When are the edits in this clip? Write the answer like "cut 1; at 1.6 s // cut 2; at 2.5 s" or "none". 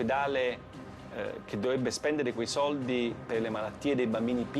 none